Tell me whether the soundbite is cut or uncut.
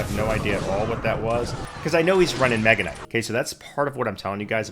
cut